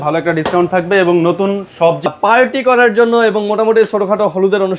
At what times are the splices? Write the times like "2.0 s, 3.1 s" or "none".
2.1 s